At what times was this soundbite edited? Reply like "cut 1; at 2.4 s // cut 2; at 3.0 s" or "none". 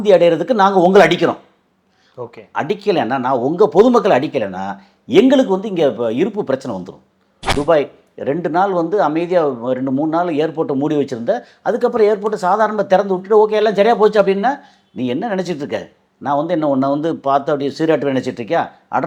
cut 1; at 7.5 s